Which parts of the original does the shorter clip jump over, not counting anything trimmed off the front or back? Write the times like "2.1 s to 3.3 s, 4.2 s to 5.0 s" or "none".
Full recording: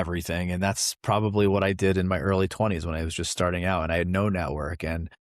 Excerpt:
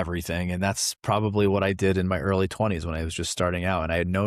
none